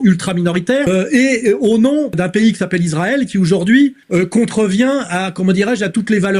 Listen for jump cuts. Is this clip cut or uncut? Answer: cut